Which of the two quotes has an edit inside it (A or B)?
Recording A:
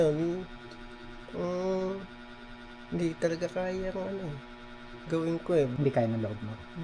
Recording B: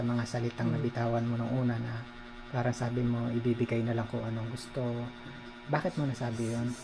A